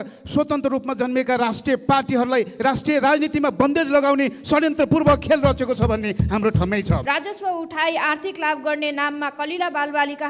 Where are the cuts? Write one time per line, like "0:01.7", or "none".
0:07.0